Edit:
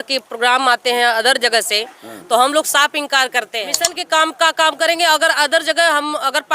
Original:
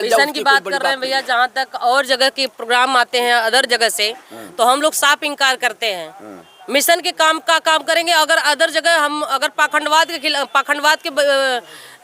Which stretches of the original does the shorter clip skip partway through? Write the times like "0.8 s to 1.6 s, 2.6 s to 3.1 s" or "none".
6.2 s to 7.0 s

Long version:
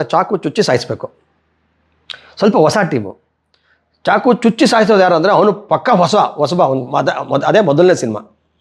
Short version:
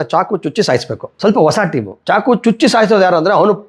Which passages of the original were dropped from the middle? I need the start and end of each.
1.0 s to 2.2 s, 3.1 s to 3.9 s

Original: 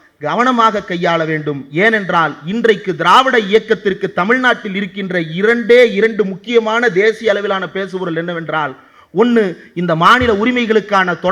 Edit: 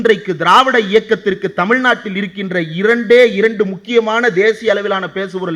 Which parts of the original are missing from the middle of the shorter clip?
none

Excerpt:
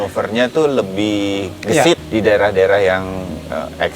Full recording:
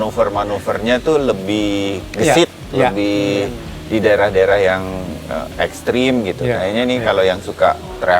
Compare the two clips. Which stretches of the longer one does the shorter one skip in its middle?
2.6 s to 3.8 s

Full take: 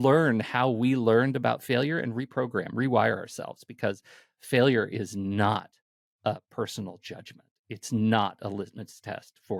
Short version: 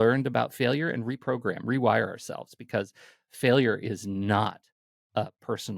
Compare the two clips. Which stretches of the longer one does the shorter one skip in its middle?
none

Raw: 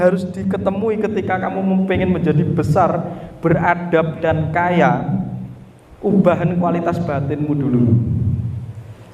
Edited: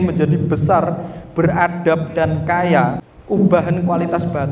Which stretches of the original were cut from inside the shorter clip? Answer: 5.1 s to 5.8 s

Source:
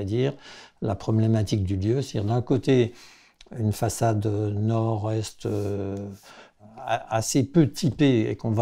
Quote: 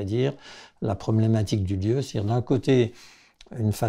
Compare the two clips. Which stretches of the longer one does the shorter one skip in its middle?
none

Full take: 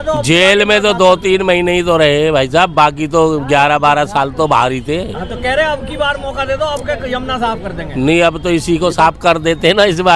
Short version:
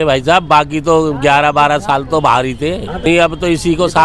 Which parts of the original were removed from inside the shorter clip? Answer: 5.3 s to 8.1 s

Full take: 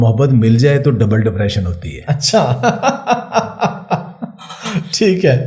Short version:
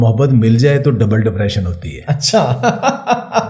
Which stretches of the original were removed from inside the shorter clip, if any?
none

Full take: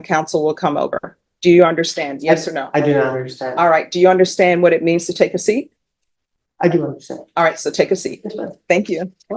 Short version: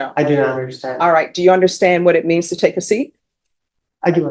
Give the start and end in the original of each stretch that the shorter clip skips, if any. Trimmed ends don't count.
none

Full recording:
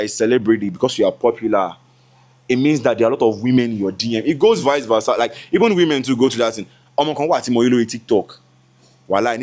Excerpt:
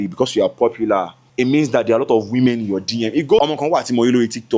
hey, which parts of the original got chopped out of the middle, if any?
1.8 s to 2.3 s, 4.5 s to 7.0 s

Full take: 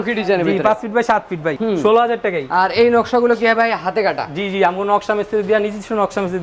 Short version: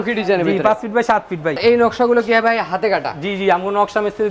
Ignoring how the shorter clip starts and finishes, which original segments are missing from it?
1.6 s to 2.7 s

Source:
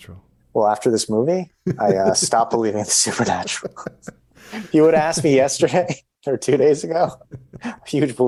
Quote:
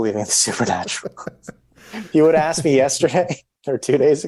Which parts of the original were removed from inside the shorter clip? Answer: none

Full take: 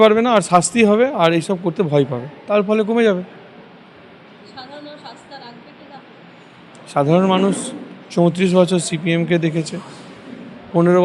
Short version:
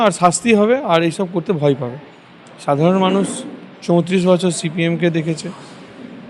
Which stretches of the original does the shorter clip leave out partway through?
2.3 s to 6.3 s

